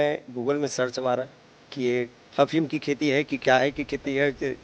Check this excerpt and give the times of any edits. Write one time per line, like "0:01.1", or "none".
0:02.2